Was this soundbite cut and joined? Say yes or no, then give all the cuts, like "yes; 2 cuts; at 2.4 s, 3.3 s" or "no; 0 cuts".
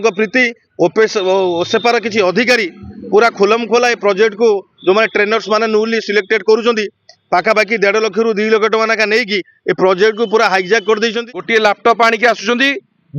yes; 1 cut; at 11.5 s